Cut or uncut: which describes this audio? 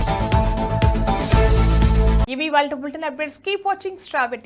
uncut